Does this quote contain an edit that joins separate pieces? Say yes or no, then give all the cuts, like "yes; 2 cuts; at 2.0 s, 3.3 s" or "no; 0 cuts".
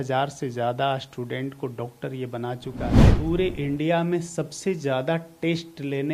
yes; 1 cut; at 3.0 s